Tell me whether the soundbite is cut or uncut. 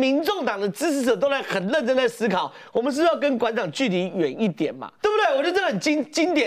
cut